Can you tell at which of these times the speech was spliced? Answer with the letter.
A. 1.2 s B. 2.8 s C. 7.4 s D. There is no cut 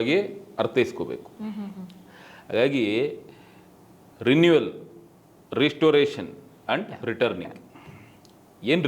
D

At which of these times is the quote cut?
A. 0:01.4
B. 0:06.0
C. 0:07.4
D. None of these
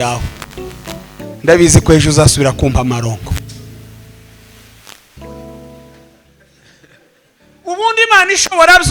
B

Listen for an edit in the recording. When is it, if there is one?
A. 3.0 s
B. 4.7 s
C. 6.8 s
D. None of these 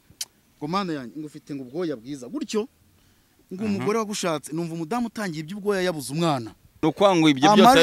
C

